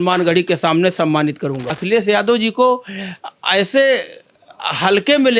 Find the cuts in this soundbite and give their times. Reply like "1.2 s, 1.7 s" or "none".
1.7 s